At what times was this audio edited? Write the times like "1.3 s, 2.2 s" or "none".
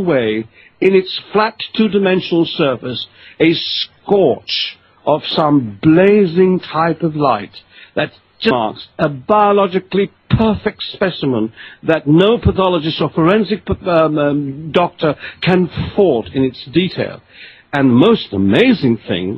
none